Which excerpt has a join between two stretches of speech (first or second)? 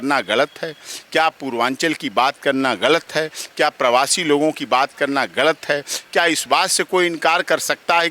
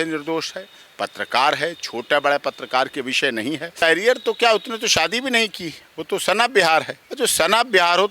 second